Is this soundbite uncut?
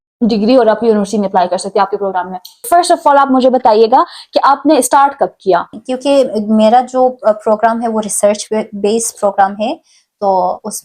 no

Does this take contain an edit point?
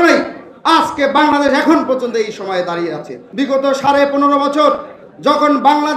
yes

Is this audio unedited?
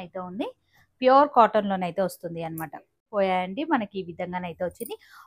no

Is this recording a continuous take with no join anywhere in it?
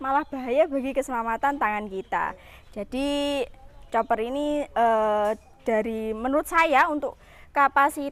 yes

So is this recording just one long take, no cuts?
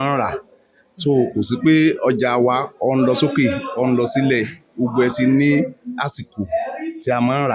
yes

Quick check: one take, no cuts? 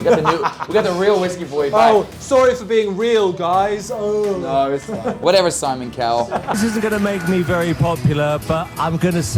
yes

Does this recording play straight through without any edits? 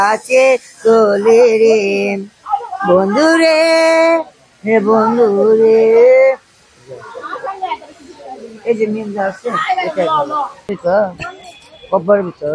no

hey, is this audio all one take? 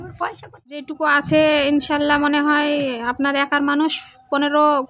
no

